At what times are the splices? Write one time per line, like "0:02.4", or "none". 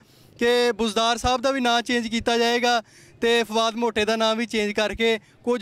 none